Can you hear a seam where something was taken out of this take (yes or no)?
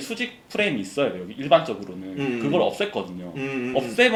no